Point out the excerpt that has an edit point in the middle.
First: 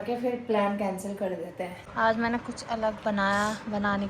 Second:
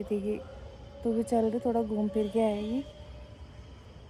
first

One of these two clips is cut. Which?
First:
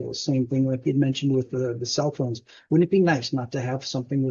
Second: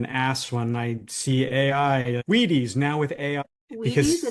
second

